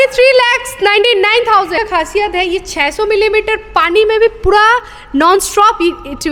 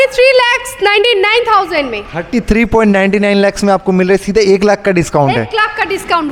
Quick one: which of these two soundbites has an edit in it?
first; 1 cut; at 1.7 s

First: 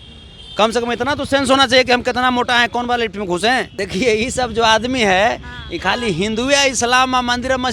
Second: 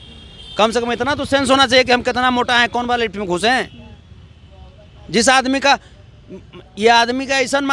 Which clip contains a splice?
first; 1 cut; at 3.8 s

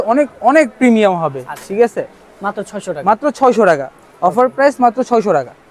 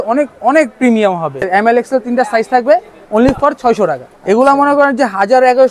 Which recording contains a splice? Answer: second; 2 cuts; at 1.4 s, 4.1 s

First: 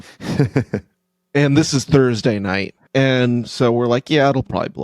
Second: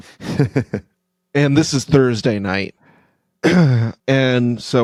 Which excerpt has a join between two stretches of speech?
first; 1 cut; at 2.8 s

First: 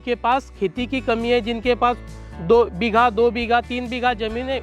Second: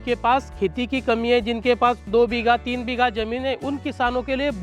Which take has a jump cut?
second; 1 cut; at 2.1 s

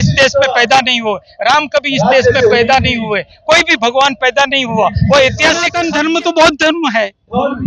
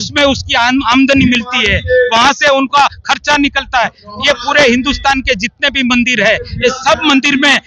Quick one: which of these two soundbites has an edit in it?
first; 1 cut; at 5.8 s

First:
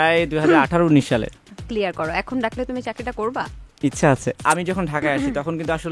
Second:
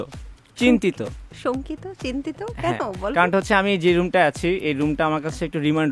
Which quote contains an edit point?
first; 1 cut; at 4.4 s

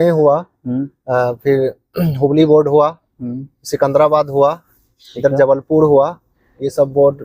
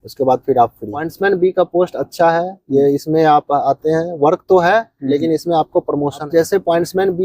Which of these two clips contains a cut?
second; 2 cuts; at 1.1 s, 6.2 s

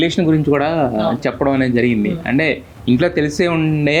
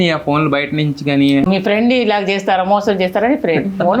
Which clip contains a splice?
second; 1 cut; at 1.4 s

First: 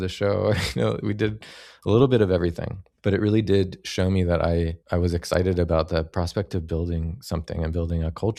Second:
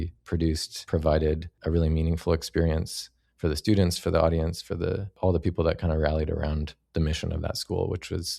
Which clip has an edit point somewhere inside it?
second; 1 cut; at 1.5 s

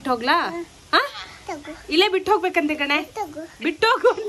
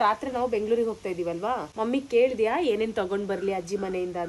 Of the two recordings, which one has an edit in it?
second; 1 cut; at 1.7 s

